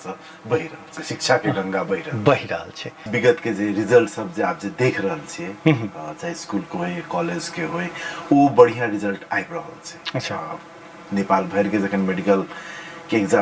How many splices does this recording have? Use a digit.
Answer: 1